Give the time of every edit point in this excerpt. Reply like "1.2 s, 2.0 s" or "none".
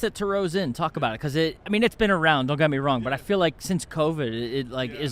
1.6 s